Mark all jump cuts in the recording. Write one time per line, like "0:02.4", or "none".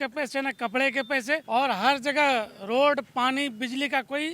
0:01.4